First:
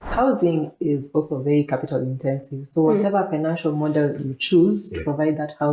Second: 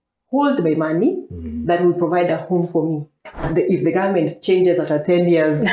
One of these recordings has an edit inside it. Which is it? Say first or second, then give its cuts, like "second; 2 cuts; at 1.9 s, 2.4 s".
second; 1 cut; at 3.4 s